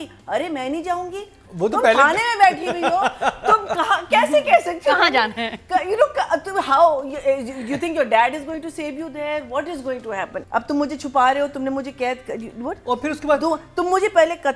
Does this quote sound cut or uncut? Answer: cut